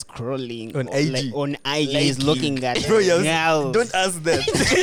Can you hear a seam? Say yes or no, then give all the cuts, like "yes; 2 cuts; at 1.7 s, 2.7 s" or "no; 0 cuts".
no; 0 cuts